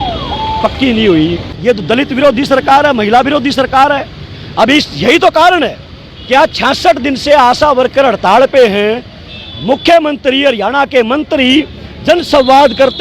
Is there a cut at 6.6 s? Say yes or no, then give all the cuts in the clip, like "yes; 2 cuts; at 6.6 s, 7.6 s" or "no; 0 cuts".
no; 1 cut; at 1.5 s